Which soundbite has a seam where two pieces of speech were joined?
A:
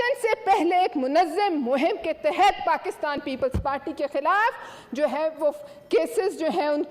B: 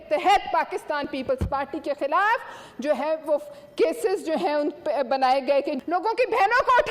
B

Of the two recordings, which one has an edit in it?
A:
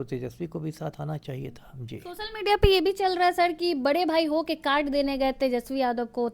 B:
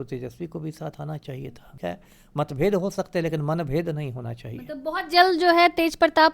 B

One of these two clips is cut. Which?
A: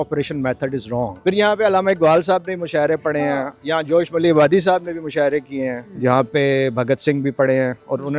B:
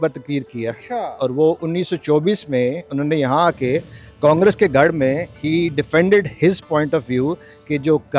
A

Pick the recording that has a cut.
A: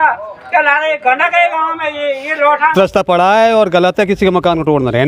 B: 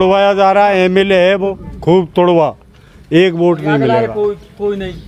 A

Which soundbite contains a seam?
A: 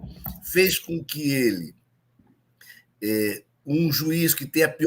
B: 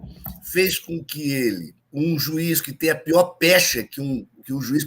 B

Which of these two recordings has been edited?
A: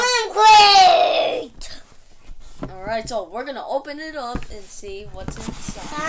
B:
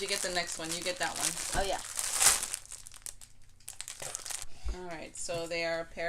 B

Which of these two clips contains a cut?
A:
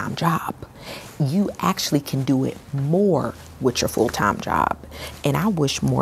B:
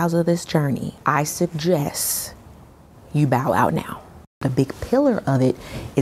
B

